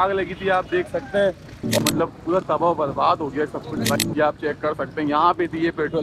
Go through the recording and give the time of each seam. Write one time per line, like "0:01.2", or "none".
0:01.8
0:04.0